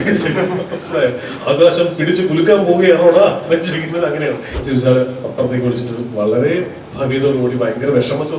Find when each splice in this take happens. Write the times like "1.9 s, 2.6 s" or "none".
4.5 s